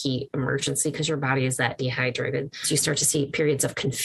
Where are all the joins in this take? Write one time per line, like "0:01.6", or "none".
0:02.6